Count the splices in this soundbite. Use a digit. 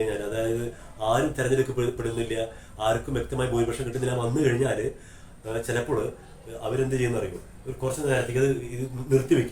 0